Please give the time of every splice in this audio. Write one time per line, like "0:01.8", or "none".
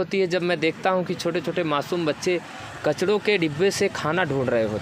none